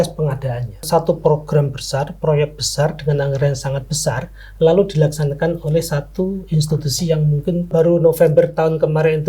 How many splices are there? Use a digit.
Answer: 2